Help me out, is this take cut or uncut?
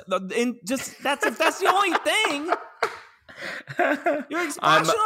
uncut